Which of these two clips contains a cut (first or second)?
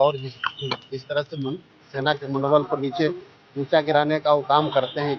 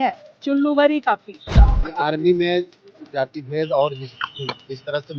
second